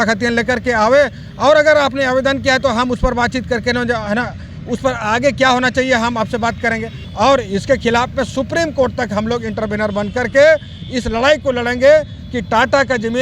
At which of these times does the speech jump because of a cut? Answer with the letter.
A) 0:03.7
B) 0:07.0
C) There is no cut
B